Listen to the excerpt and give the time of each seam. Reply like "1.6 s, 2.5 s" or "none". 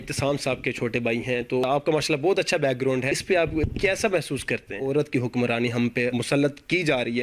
1.6 s, 3.5 s, 4.8 s, 6.1 s